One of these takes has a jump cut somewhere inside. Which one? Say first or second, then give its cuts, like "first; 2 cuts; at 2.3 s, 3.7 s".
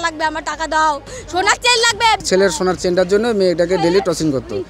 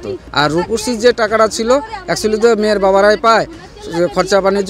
first; 1 cut; at 2.2 s